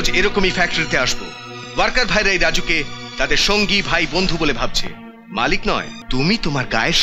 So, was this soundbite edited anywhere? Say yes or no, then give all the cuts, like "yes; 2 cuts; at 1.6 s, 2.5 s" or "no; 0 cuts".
yes; 1 cut; at 6.0 s